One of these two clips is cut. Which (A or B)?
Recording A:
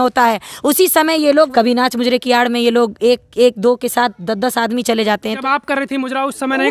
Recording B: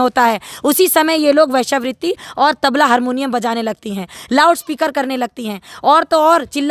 A